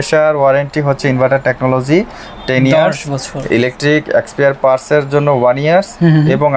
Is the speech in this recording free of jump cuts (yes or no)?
yes